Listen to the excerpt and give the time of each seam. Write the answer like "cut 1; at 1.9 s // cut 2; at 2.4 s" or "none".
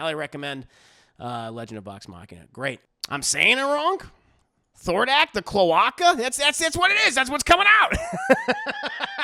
cut 1; at 2.9 s